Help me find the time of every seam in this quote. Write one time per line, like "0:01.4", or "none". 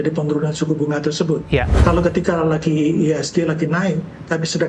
0:01.7